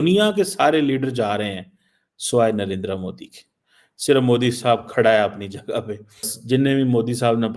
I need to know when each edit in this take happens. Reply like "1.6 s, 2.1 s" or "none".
6.3 s